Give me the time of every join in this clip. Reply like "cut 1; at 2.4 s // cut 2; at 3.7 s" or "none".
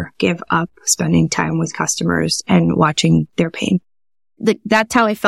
cut 1; at 4.3 s

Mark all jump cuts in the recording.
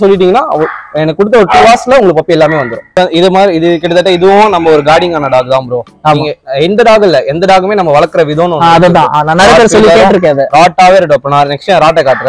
cut 1; at 3.0 s

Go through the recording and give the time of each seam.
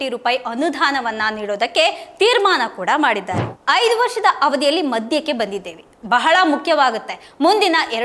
cut 1; at 3.4 s

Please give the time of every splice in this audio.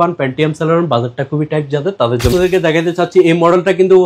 cut 1; at 2.3 s

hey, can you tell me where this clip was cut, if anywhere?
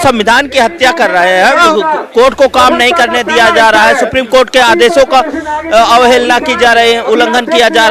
cut 1; at 1.7 s

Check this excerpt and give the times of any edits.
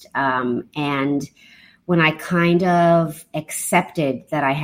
none

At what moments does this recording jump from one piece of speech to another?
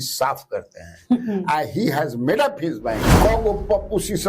cut 1; at 3.1 s

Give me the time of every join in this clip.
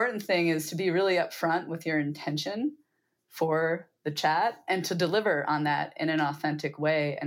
none

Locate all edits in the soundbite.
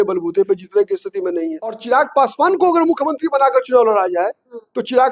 cut 1; at 1.8 s

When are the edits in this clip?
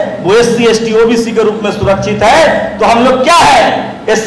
none

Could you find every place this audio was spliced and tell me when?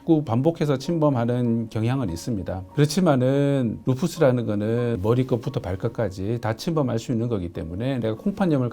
cut 1; at 2.7 s // cut 2; at 5.0 s

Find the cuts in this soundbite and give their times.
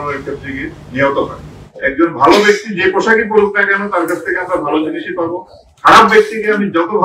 cut 1; at 1.6 s

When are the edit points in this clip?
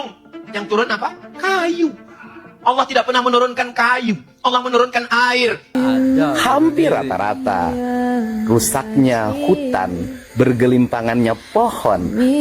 cut 1; at 5.8 s

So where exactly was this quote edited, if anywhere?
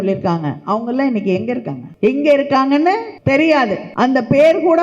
cut 1; at 1.8 s // cut 2; at 3.1 s // cut 3; at 3.8 s

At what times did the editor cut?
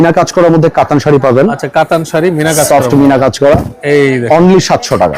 none

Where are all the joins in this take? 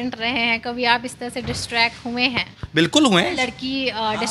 none

